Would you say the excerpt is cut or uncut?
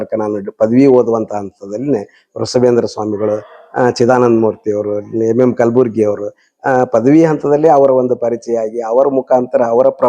uncut